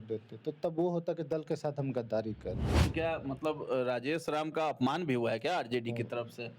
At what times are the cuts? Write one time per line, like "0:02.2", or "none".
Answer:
0:02.7